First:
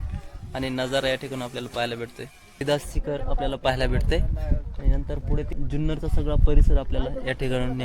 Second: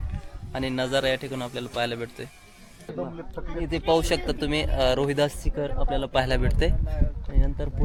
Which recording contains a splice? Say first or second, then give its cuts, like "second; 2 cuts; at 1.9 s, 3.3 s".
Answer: first; 2 cuts; at 2.6 s, 5.5 s